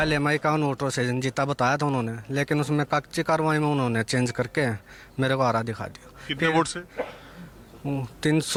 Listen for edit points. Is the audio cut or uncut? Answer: uncut